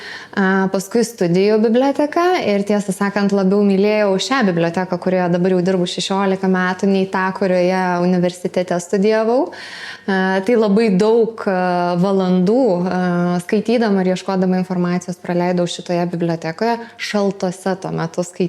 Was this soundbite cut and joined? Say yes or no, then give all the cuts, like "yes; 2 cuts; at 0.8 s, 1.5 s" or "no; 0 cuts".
no; 0 cuts